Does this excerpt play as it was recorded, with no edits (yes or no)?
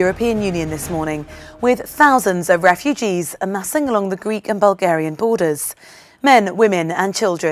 yes